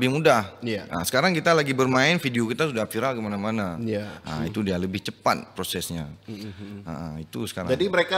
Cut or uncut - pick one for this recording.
uncut